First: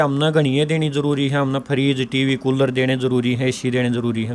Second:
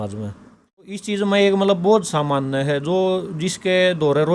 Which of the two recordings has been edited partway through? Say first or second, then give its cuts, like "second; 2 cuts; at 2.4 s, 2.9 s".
second; 1 cut; at 1.0 s